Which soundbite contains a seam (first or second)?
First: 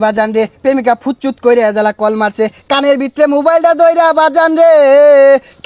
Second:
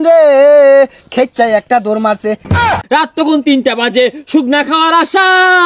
second